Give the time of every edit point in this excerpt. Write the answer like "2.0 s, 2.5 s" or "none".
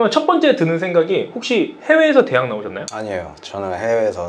2.9 s